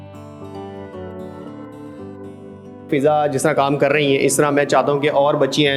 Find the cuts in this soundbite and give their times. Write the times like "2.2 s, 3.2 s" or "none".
2.9 s